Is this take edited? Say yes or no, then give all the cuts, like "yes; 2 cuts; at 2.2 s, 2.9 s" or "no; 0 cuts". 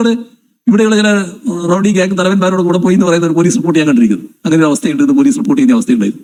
no; 0 cuts